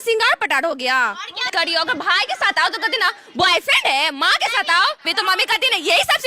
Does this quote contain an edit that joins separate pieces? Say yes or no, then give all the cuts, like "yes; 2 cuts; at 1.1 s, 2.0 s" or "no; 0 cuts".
yes; 2 cuts; at 1.4 s, 5.1 s